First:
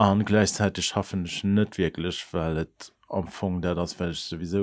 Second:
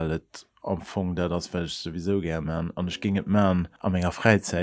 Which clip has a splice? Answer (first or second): second